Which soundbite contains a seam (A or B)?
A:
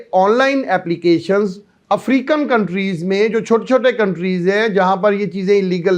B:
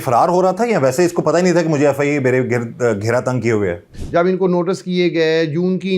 B